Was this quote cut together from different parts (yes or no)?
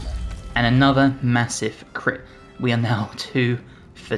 no